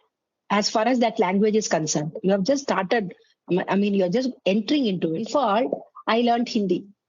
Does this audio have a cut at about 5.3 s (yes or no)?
yes